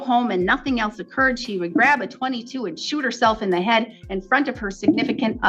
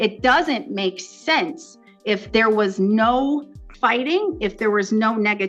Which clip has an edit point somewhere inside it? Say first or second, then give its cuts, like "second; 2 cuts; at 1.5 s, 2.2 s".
second; 1 cut; at 3.6 s